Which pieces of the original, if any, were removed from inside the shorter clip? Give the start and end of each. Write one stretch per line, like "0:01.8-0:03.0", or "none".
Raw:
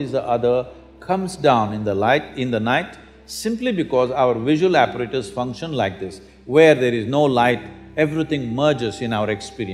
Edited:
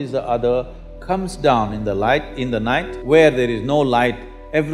0:02.9-0:06.4